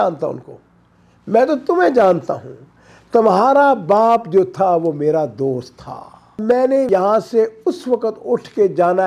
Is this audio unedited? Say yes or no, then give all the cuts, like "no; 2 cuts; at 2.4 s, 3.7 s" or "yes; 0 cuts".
no; 1 cut; at 6.4 s